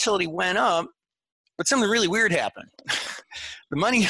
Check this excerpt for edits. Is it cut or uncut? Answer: uncut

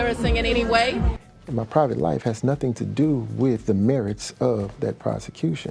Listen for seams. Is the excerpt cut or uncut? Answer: uncut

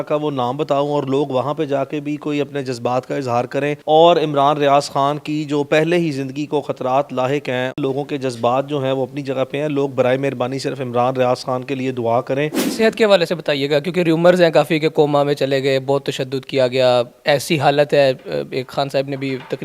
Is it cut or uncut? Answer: cut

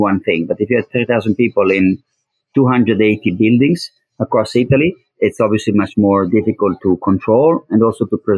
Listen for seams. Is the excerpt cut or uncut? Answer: cut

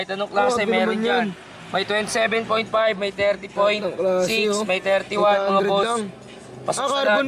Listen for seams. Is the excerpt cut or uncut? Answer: uncut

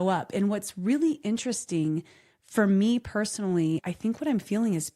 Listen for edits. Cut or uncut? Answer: cut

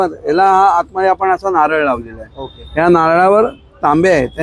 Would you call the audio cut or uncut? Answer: uncut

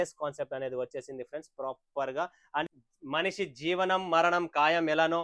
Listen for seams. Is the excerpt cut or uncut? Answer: cut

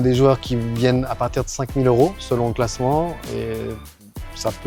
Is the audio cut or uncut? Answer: uncut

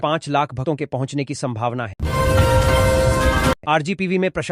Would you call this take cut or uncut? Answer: uncut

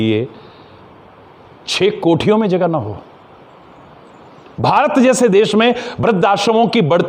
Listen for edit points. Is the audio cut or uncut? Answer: uncut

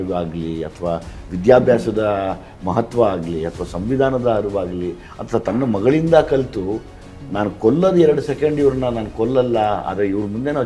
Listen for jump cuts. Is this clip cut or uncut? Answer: uncut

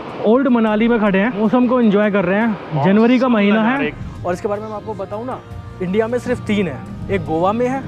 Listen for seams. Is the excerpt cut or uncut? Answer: cut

